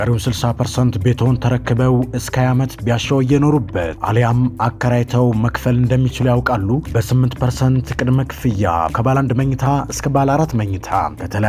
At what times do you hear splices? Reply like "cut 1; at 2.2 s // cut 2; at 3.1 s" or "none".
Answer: none